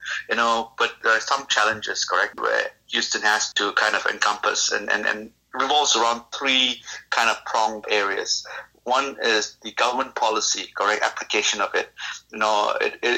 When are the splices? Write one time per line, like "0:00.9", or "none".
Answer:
0:01.0
0:02.4
0:03.5
0:05.4
0:07.8